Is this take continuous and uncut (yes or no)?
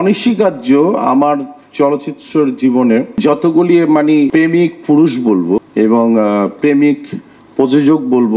no